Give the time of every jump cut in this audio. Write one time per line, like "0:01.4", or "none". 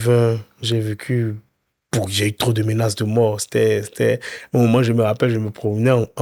none